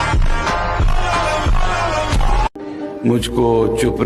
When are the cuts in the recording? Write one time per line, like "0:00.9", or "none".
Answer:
0:02.6